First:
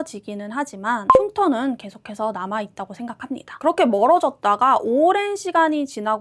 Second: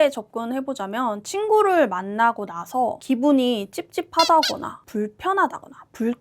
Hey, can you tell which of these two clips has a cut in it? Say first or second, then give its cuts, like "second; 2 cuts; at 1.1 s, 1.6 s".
first; 1 cut; at 3.6 s